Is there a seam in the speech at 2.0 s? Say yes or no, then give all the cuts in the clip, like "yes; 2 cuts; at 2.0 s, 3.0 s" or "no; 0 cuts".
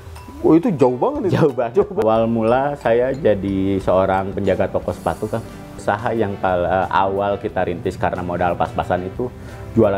yes; 2 cuts; at 2.0 s, 5.8 s